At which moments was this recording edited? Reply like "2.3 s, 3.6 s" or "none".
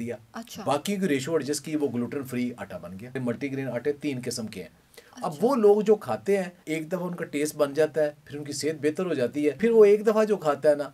3.2 s, 6.6 s, 9.6 s